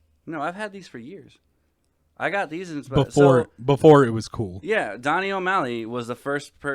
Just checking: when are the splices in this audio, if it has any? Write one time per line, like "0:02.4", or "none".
none

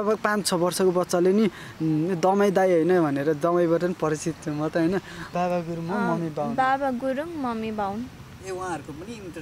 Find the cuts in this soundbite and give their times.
0:05.2

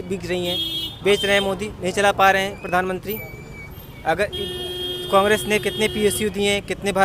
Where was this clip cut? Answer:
none

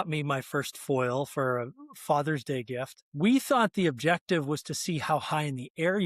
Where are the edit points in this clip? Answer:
0:03.0

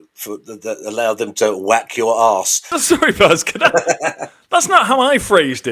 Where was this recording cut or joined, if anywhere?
0:02.7

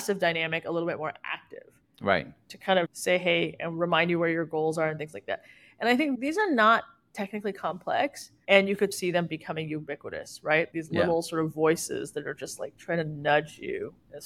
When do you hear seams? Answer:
0:02.9
0:06.2
0:08.9
0:10.7

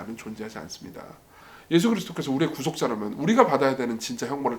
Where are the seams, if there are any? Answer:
0:01.4

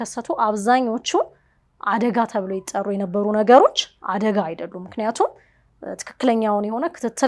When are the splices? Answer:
none

